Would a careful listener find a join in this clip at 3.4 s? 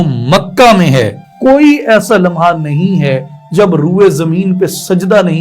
no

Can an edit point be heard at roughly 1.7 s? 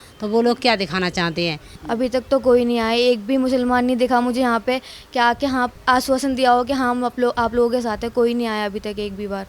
yes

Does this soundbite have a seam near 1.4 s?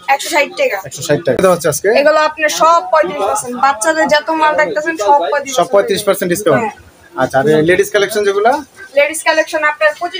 yes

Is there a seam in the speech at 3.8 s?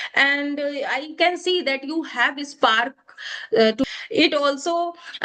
yes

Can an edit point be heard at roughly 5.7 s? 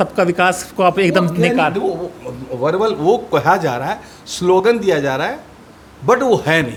no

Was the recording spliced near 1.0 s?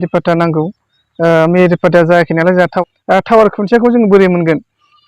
no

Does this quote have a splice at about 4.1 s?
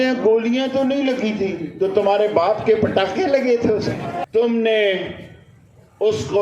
yes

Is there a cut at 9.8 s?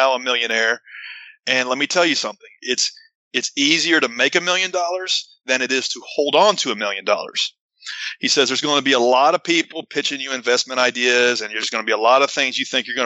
no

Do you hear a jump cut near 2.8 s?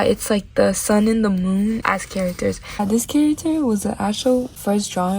yes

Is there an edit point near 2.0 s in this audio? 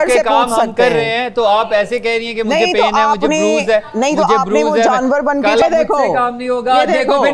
no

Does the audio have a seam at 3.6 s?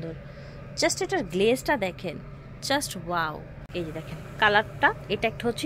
yes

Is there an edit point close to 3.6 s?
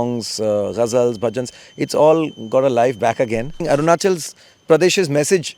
yes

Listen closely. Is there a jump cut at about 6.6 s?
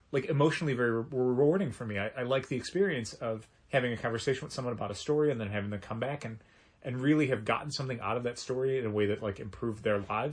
no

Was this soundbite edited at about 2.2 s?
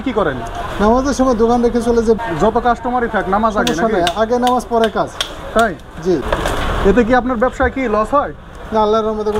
yes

